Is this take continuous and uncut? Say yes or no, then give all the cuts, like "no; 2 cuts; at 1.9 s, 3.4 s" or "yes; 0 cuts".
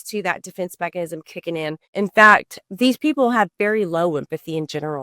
no; 2 cuts; at 1.8 s, 2.5 s